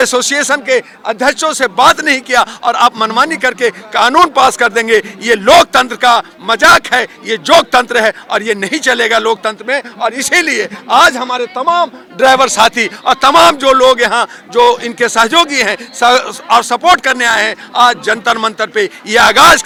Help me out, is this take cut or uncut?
uncut